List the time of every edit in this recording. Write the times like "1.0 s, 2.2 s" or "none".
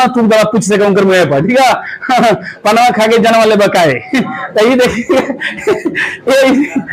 none